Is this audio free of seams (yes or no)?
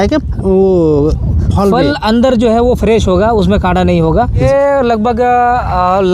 no